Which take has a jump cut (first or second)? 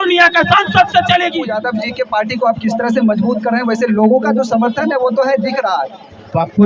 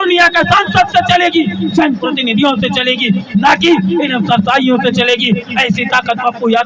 first